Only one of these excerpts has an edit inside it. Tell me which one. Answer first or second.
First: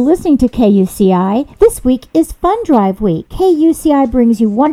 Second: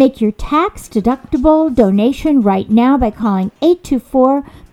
first